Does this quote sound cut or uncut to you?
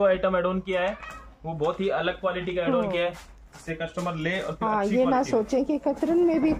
uncut